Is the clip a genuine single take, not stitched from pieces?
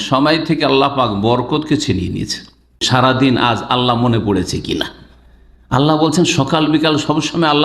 no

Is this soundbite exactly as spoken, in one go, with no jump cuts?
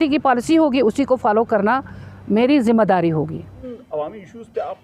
no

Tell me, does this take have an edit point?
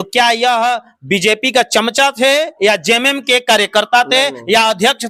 no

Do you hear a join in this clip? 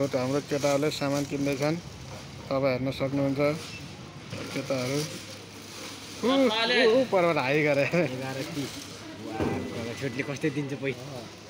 no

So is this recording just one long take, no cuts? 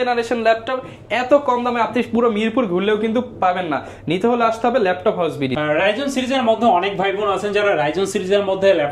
yes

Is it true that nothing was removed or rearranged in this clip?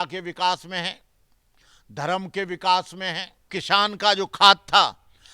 no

